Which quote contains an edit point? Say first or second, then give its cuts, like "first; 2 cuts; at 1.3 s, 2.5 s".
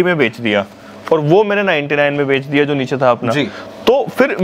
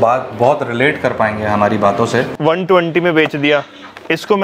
second; 1 cut; at 2.3 s